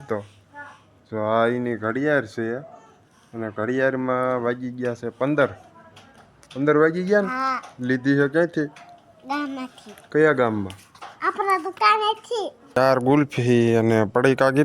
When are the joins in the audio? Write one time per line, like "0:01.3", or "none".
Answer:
0:12.8